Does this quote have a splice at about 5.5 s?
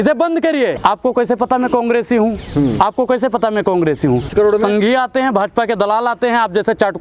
no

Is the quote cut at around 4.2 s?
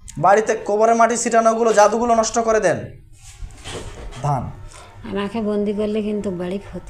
yes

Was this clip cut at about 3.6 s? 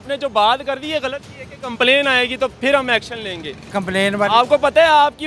yes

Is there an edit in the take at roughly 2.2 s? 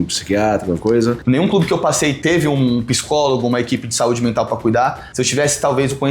yes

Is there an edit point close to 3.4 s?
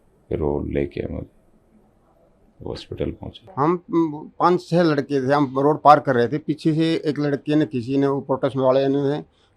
yes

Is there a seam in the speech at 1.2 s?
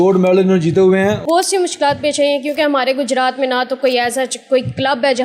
yes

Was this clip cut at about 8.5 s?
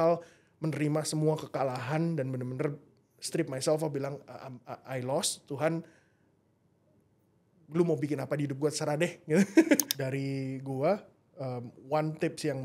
no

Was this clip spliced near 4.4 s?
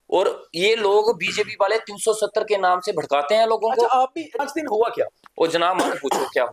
yes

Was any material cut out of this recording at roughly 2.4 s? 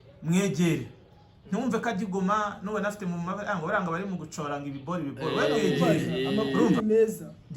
no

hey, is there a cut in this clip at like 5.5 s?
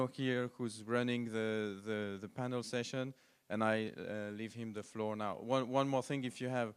no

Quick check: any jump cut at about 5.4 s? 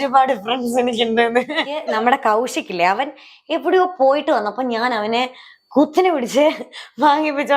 no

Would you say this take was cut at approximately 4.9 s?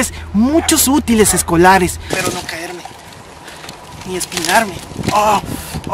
no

